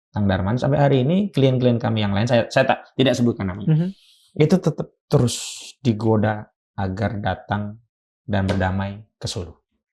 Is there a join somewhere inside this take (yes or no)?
no